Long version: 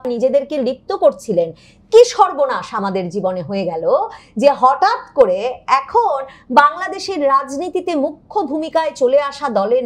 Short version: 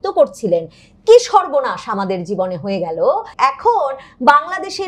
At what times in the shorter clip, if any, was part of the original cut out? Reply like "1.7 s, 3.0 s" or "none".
3.3 s

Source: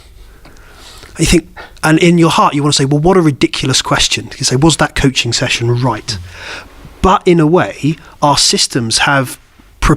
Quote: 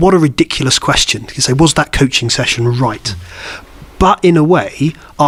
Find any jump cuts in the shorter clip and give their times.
none

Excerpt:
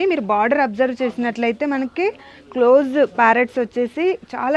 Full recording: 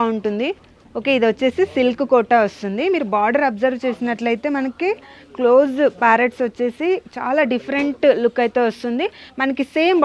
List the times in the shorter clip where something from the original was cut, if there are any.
none

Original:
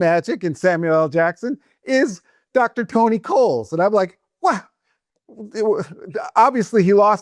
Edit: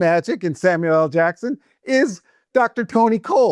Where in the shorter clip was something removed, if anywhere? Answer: none

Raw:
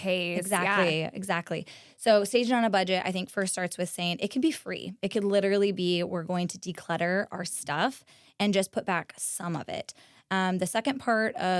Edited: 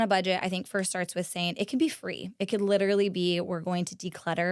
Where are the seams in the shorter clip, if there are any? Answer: none

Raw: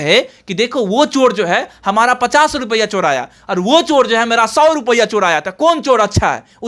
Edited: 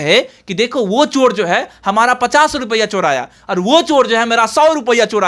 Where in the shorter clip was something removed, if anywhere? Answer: none

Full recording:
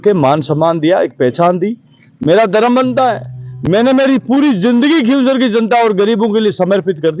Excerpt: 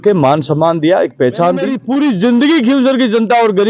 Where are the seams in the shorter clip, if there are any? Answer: 1.8 s

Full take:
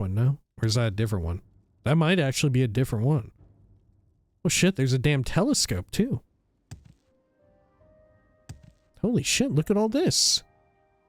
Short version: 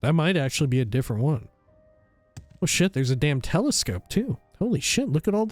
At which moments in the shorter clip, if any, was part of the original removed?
4.4 s

